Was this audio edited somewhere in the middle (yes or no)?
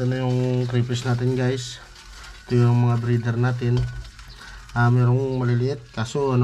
no